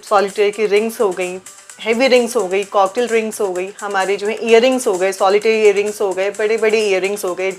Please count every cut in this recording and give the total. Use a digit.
0